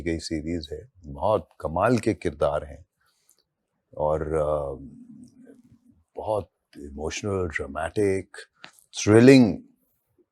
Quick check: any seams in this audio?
no; 0 cuts

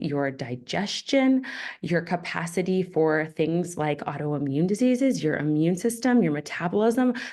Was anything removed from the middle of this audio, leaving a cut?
no; 0 cuts

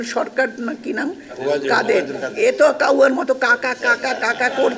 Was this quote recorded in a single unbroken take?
yes; 0 cuts

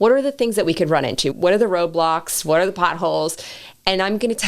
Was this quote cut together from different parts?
yes; 1 cut; at 1.3 s

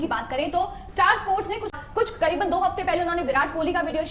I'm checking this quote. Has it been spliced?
yes; 1 cut; at 1.7 s

